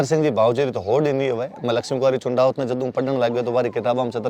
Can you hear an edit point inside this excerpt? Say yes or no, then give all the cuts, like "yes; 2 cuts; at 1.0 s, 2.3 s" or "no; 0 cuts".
no; 0 cuts